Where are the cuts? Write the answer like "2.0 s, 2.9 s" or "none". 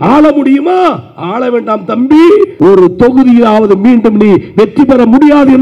2.5 s